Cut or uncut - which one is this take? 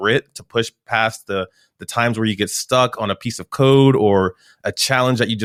uncut